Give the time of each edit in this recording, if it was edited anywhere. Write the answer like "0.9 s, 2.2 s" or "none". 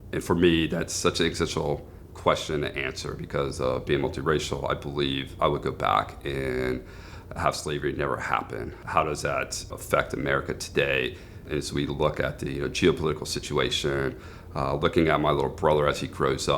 8.8 s, 9.7 s, 11.4 s